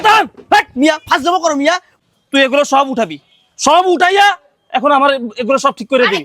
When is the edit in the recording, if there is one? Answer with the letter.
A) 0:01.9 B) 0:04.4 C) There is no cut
A